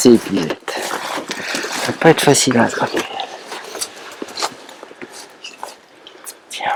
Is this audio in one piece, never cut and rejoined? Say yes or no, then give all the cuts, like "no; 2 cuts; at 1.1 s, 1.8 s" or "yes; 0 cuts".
yes; 0 cuts